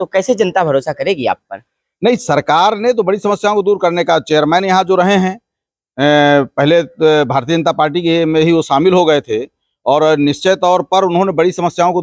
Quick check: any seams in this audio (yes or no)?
no